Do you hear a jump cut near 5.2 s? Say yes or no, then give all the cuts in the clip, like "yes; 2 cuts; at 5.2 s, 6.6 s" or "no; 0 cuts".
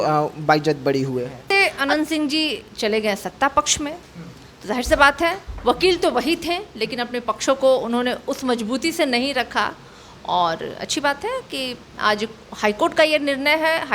no; 1 cut; at 1.5 s